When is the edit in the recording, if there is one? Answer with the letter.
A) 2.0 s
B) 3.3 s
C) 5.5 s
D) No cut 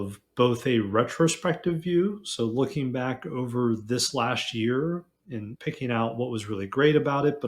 C